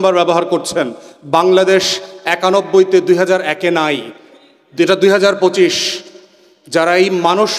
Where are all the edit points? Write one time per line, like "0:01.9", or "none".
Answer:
none